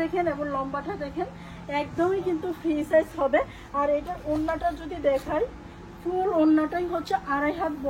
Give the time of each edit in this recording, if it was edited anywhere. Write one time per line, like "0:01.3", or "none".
none